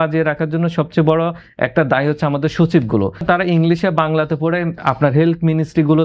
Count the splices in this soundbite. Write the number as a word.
one